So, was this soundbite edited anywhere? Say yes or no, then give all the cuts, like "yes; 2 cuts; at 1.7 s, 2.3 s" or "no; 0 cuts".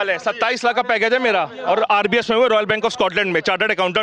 no; 0 cuts